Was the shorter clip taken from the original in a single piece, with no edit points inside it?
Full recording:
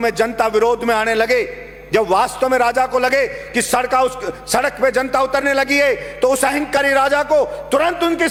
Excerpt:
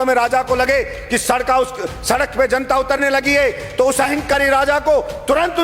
yes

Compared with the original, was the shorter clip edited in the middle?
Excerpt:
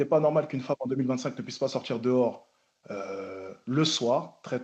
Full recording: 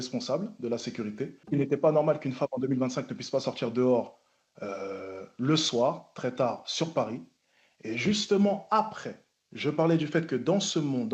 no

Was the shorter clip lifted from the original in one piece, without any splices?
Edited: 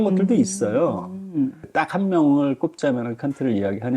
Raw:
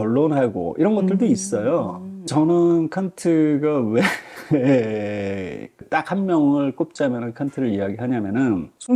no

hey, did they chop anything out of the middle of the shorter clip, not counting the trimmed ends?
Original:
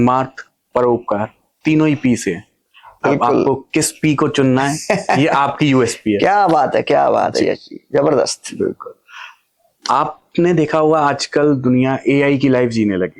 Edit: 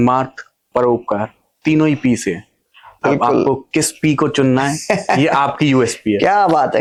no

